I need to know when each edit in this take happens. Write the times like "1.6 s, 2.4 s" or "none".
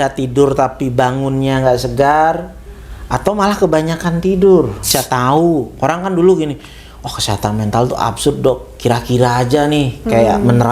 4.9 s